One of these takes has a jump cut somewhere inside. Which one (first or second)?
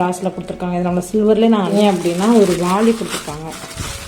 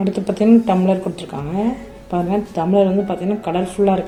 first